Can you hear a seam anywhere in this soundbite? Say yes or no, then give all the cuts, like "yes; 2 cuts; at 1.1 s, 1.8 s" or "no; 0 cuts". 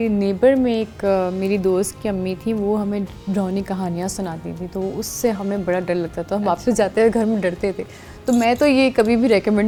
no; 0 cuts